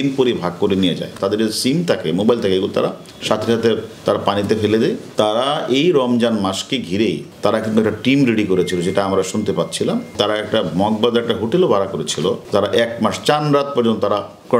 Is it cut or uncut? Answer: cut